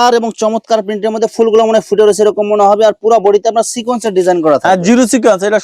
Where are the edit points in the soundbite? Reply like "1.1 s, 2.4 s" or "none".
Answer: none